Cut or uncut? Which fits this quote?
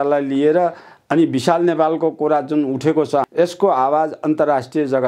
cut